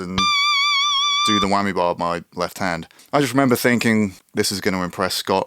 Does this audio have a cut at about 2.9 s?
yes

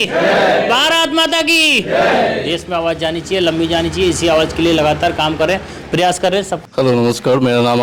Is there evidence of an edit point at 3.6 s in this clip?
no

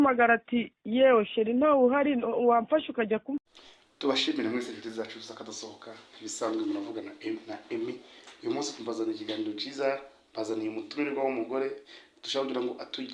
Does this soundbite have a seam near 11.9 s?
no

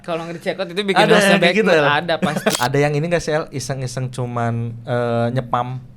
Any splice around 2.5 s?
yes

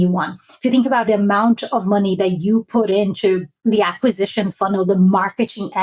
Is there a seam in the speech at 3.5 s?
yes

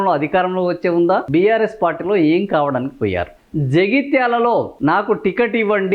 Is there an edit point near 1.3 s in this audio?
yes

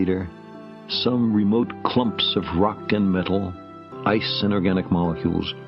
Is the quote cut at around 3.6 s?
yes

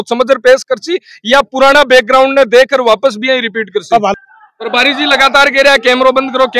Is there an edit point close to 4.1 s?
yes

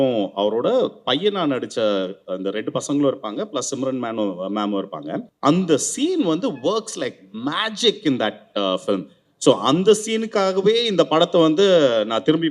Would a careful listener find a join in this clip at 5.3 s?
yes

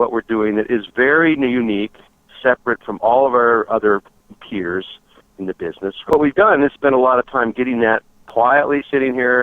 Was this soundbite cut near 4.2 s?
yes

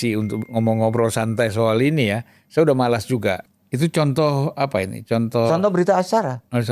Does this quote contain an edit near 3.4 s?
yes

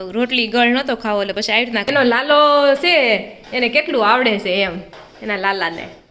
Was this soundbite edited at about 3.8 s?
no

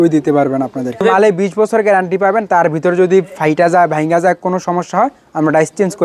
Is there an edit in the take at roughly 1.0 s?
yes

